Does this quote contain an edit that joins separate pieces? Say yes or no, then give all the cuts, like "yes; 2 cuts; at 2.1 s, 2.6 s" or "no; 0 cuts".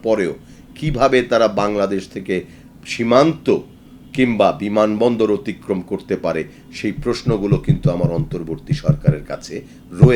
no; 0 cuts